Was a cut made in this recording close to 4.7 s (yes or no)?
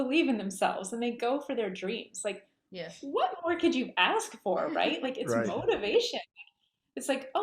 no